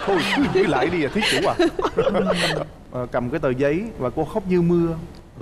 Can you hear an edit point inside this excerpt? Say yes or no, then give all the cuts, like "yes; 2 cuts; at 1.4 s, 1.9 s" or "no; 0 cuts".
yes; 1 cut; at 2.8 s